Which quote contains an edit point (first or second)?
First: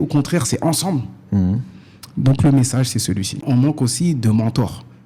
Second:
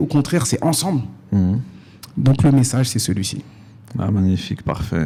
first